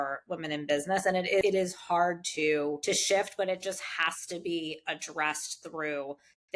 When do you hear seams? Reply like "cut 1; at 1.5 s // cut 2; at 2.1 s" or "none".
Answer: cut 1; at 1.4 s // cut 2; at 2.8 s